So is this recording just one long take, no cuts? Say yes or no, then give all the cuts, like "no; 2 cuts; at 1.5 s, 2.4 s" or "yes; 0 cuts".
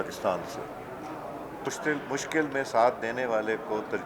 no; 1 cut; at 1.7 s